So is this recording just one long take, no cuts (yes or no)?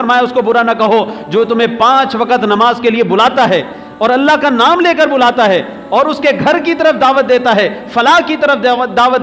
yes